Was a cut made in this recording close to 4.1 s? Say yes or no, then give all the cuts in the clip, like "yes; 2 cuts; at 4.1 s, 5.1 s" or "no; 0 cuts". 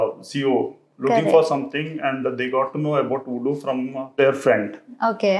yes; 1 cut; at 4.1 s